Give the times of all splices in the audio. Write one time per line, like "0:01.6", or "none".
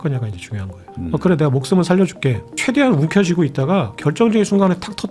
0:02.5